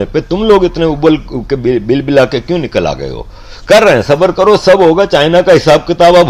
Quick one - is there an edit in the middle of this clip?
no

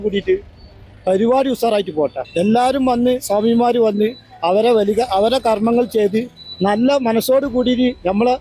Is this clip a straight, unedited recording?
no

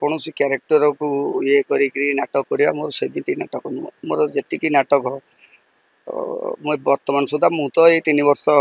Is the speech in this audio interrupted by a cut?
no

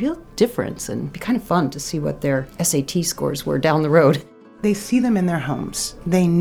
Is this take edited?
yes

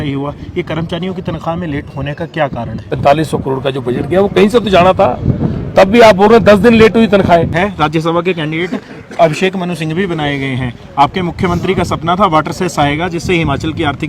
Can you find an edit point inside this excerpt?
yes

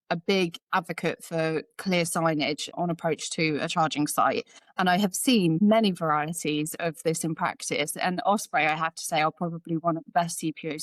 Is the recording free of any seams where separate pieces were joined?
yes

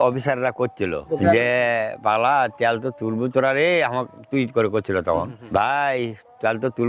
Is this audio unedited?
no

